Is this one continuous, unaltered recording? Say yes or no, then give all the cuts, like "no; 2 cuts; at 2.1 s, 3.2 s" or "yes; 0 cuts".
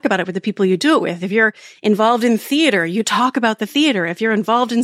yes; 0 cuts